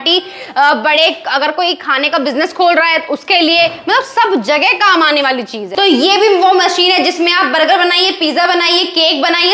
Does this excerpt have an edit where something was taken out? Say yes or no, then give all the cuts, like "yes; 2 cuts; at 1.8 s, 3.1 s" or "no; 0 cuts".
yes; 1 cut; at 5.6 s